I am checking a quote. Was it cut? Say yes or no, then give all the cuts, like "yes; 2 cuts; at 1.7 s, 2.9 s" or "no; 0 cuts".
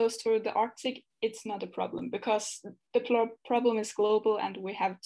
no; 0 cuts